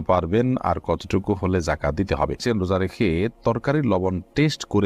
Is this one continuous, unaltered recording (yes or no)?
no